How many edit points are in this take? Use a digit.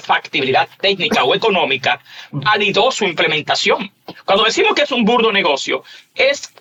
0